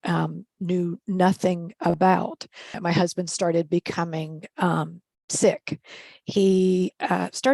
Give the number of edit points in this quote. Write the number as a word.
one